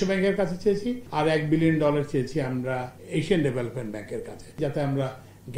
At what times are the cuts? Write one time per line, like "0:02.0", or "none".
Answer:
0:01.0
0:03.0
0:04.6